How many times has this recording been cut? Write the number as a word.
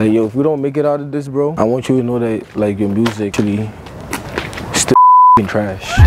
one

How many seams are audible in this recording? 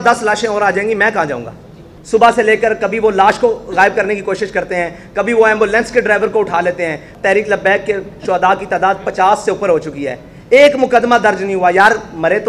two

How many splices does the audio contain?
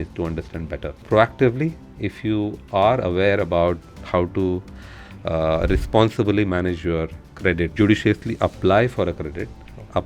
two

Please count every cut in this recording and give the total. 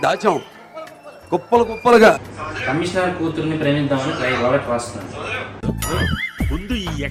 zero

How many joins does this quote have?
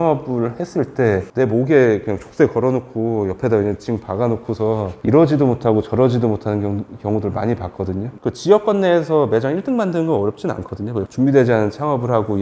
two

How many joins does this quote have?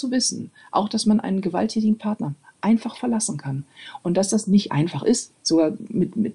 one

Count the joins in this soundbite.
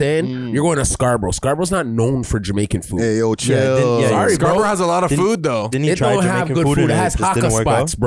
zero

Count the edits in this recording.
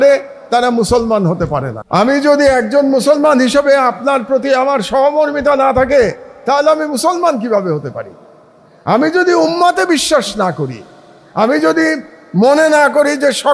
one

